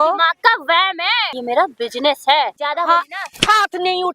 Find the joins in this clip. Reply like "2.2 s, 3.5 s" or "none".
1.3 s, 2.6 s